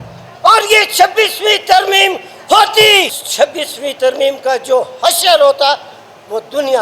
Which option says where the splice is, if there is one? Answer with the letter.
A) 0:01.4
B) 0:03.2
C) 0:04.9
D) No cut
B